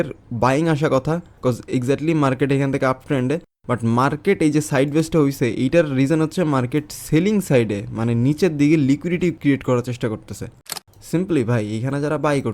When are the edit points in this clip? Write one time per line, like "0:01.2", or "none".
0:10.6